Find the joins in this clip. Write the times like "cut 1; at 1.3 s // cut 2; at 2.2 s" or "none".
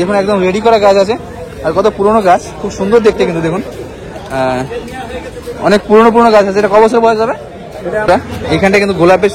cut 1; at 8.0 s